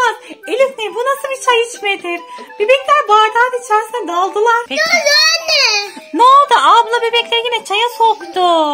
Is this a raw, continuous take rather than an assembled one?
no; 1 cut; at 4.7 s

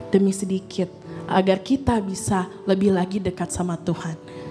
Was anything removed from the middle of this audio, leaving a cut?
no; 0 cuts

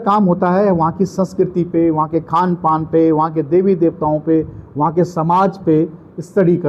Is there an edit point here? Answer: no; 0 cuts

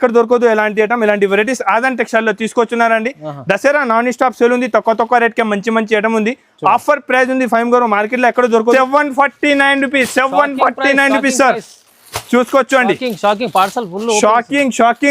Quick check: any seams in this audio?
yes; 1 cut; at 8.7 s

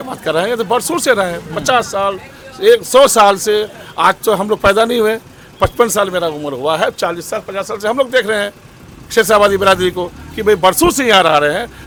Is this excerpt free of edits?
yes; 0 cuts

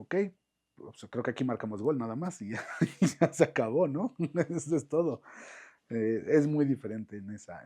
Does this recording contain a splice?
no; 0 cuts

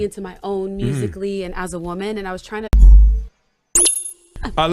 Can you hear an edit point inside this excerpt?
no; 0 cuts

